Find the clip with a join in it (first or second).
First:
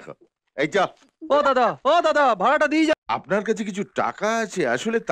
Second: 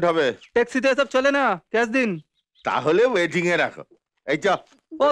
first